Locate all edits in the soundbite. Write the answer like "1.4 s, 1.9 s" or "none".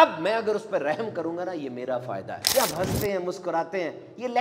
2.4 s